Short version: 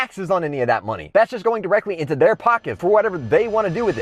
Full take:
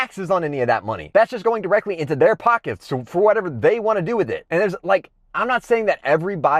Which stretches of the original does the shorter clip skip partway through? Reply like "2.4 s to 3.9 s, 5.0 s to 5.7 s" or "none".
2.7 s to 3.0 s

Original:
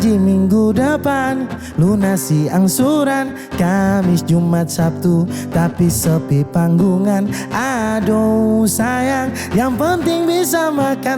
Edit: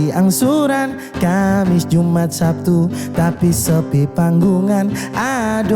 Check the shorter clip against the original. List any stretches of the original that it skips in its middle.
none

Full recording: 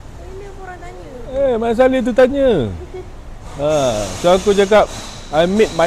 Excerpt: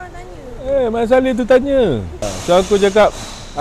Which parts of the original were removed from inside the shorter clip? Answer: 3.0 s to 4.1 s

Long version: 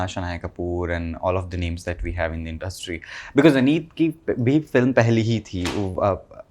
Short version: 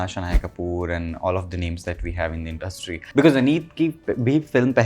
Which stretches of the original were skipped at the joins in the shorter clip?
3.0 s to 3.2 s

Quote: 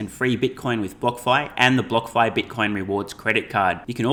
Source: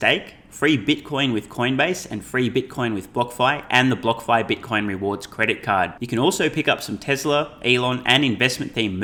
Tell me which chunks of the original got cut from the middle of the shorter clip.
none

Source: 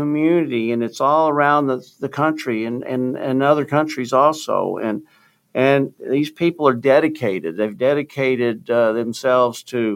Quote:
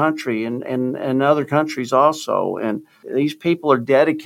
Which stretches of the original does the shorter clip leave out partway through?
5.2 s to 6.0 s

